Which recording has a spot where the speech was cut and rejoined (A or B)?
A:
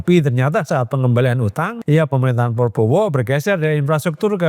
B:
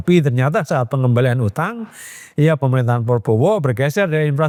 A